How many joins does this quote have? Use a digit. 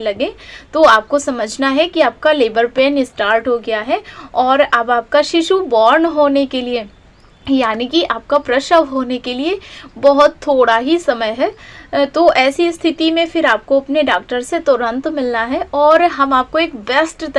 0